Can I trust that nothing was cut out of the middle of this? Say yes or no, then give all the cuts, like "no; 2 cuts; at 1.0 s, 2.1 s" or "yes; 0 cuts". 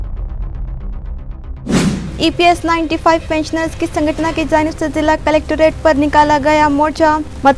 no; 1 cut; at 1.7 s